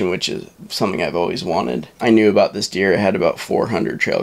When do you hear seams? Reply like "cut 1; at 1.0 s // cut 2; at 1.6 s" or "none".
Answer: cut 1; at 1.9 s